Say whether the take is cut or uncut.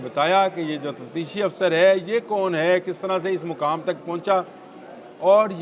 uncut